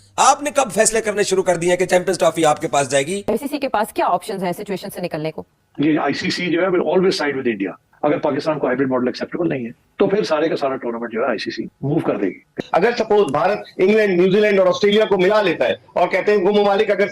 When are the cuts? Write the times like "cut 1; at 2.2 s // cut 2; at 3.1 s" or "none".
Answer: cut 1; at 3.2 s // cut 2; at 5.5 s // cut 3; at 7.9 s // cut 4; at 12.6 s